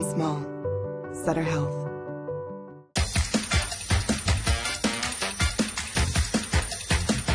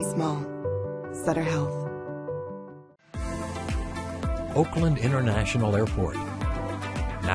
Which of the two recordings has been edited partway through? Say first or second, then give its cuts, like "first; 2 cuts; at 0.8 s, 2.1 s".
second; 1 cut; at 2.8 s